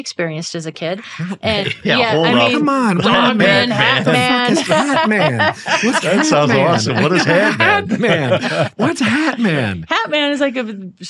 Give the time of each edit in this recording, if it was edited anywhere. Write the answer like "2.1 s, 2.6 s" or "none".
none